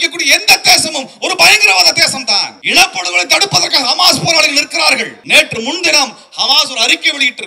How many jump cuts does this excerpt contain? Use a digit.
2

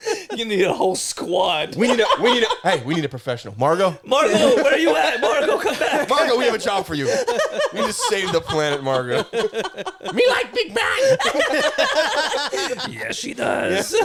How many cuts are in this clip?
0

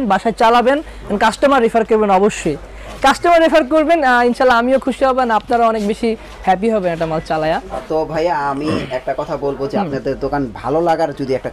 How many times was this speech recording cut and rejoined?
0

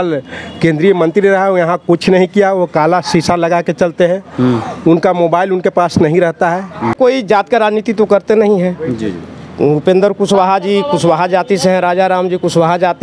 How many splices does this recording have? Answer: 1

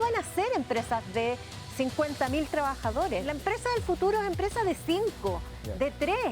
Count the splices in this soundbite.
1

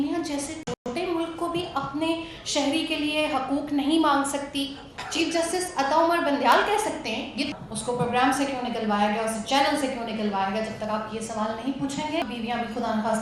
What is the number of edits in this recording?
2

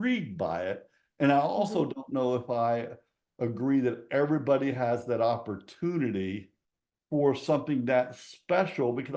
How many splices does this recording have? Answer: 0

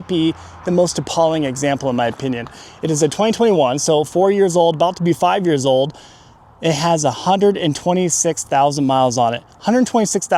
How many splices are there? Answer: 0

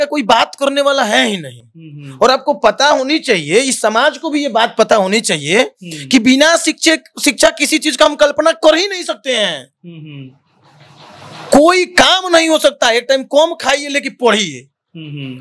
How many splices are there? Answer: 0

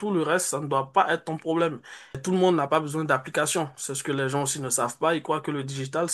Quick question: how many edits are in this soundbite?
1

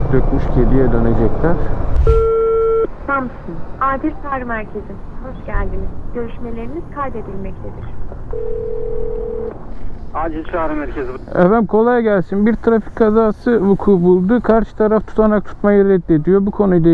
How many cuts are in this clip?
1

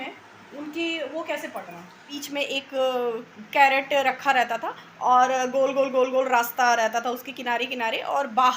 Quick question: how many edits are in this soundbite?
1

